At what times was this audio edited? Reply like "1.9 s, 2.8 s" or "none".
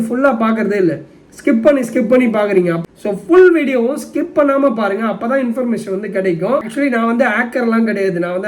2.8 s, 6.7 s